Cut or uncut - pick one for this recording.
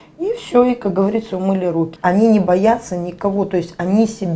cut